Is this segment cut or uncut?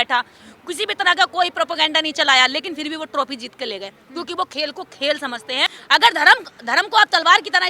cut